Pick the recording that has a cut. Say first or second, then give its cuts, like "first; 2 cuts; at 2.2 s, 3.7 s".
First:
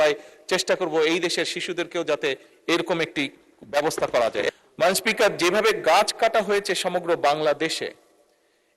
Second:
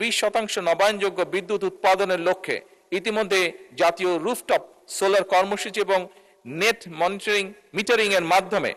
first; 1 cut; at 4.5 s